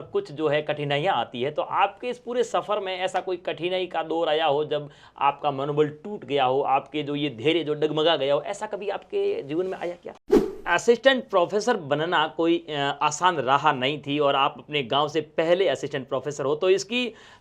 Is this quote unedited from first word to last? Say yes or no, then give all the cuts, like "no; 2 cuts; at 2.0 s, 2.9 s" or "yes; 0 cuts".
no; 1 cut; at 10.3 s